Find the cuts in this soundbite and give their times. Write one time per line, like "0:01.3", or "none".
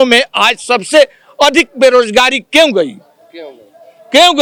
none